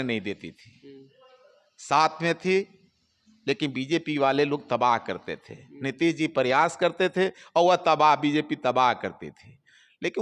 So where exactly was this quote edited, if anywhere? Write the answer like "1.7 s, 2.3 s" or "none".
none